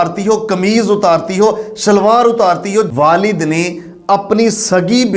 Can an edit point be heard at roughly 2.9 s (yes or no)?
yes